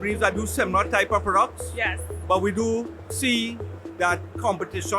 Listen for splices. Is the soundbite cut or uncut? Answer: cut